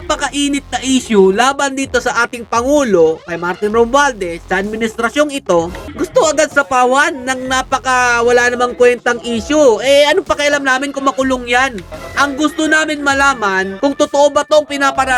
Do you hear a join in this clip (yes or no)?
no